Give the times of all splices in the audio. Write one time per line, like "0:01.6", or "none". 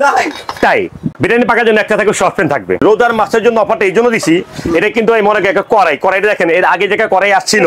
0:01.0
0:02.8